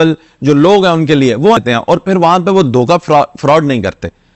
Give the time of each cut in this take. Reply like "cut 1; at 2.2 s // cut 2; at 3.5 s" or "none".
cut 1; at 1.6 s